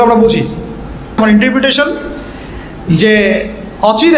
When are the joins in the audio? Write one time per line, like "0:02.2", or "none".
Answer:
0:01.2